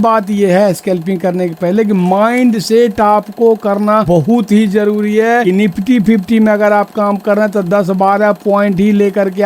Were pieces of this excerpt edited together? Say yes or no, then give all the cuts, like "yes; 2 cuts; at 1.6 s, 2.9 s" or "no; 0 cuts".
yes; 2 cuts; at 4.0 s, 5.4 s